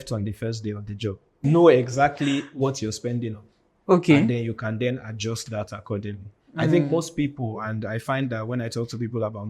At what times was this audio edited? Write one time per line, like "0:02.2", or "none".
0:01.5